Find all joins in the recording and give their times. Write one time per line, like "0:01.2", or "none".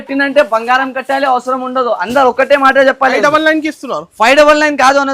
0:03.2